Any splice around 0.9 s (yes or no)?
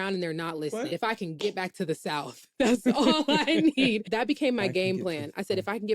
yes